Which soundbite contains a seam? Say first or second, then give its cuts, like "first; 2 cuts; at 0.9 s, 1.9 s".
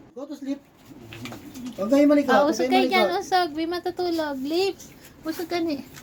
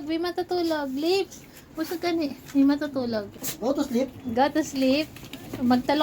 second; 1 cut; at 3.5 s